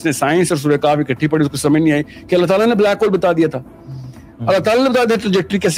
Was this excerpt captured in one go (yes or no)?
yes